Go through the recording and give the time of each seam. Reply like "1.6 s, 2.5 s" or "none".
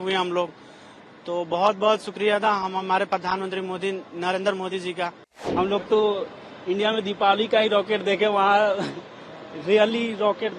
5.4 s